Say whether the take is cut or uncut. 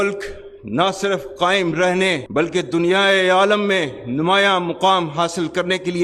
uncut